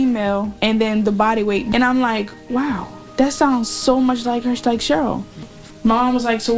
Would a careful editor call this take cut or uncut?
cut